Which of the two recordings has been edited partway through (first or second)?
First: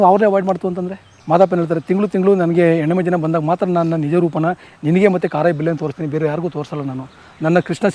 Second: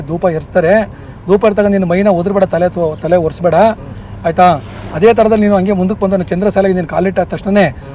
first